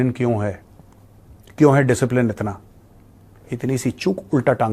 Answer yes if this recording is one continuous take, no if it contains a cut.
yes